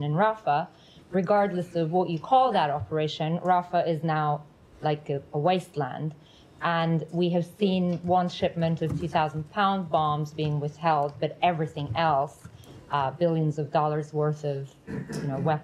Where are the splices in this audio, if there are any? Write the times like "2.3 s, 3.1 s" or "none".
none